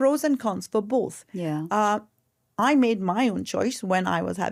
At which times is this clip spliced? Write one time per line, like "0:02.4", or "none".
none